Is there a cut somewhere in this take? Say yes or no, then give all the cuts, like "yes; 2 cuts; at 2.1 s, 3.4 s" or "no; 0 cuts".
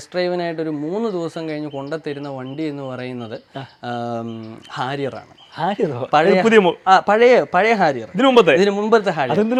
no; 0 cuts